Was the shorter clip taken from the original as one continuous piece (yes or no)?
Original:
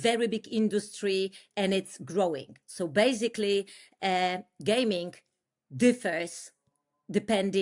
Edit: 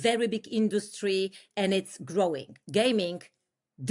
no